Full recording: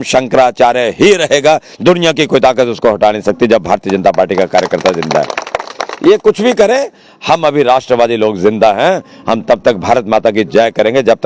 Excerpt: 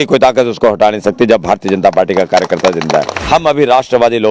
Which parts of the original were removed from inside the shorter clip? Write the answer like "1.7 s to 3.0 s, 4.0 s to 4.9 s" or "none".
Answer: 5.4 s to 7.1 s